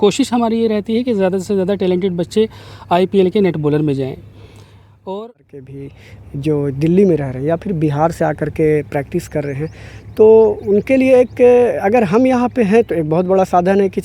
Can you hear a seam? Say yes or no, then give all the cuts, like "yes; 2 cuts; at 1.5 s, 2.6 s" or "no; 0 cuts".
yes; 1 cut; at 5.7 s